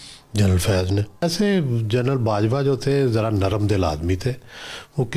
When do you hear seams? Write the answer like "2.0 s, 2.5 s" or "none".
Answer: 1.2 s